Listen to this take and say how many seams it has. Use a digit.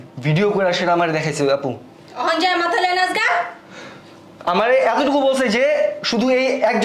0